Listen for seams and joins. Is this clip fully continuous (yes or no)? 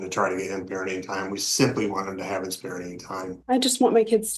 no